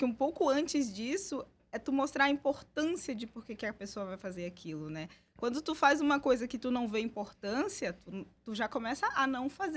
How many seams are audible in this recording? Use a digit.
0